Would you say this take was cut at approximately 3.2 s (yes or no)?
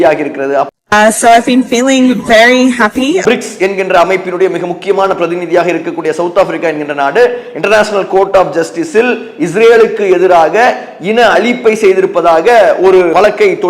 yes